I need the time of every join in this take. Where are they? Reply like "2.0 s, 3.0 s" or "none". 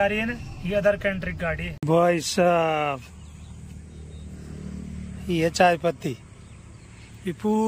1.9 s